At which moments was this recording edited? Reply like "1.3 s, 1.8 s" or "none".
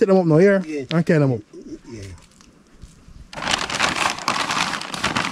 none